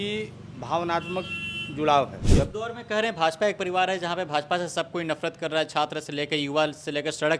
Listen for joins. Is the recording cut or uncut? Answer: cut